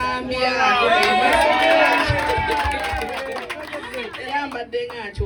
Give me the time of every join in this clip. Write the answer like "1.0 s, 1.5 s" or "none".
none